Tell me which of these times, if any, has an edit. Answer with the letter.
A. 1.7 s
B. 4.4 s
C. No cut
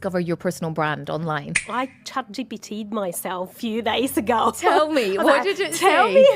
A